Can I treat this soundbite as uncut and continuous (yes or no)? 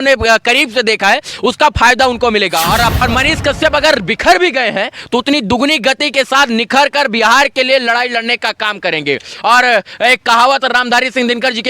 no